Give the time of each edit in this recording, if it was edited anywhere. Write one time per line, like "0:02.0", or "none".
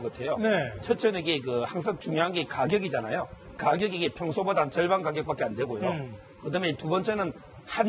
none